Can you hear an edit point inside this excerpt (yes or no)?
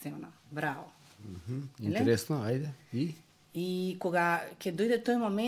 no